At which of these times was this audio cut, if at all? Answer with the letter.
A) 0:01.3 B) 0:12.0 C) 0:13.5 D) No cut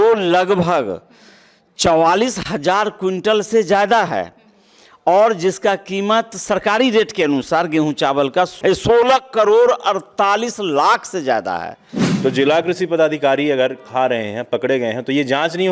B